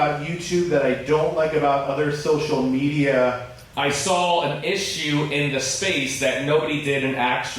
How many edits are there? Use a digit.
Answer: 1